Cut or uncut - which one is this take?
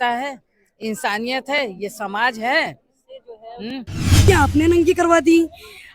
cut